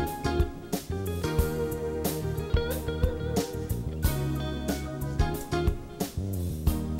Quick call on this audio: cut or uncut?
uncut